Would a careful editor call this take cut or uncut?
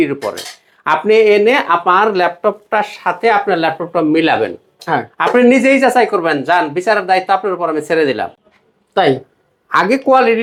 uncut